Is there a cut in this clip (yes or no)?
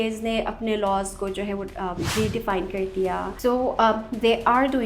yes